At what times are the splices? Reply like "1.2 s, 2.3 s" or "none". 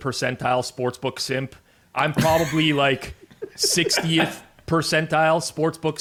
none